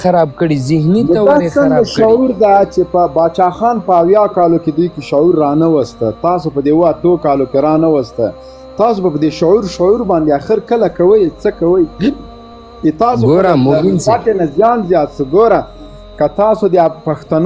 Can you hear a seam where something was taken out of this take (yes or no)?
no